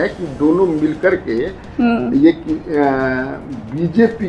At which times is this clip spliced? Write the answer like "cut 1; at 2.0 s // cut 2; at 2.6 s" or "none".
none